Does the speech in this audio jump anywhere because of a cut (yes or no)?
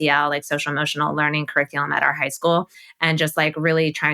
yes